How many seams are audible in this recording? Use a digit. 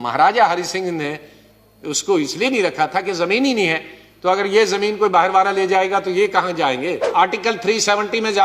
1